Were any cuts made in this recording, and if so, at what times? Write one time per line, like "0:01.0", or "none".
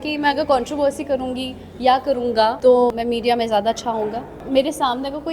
0:02.9
0:04.3